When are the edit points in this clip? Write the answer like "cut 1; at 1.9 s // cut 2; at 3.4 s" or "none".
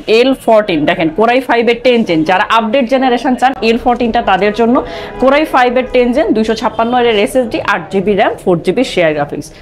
none